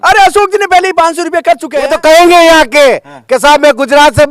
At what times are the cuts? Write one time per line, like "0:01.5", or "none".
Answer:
0:01.7

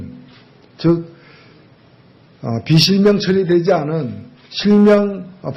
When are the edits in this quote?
0:01.6

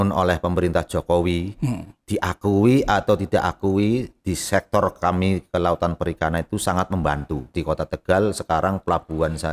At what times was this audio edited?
0:07.6

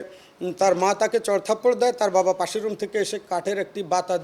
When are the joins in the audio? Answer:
none

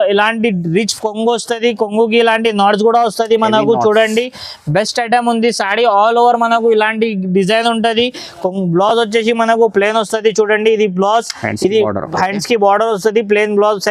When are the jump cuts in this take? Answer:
none

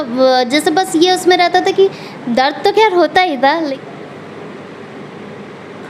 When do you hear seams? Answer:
0:03.7

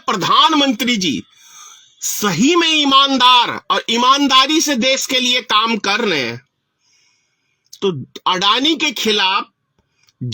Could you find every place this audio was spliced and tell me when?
none

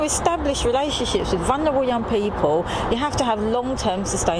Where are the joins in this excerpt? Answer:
0:02.9

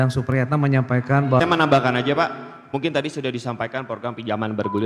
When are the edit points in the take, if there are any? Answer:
0:01.4

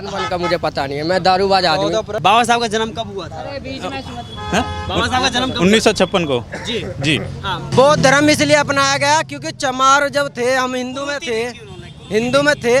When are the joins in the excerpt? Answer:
0:02.1
0:07.7

